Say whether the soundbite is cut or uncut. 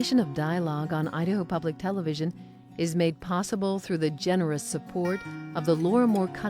uncut